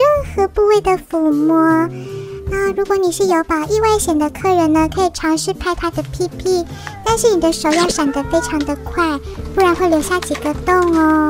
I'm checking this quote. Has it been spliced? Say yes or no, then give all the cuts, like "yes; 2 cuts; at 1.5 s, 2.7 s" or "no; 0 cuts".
no; 0 cuts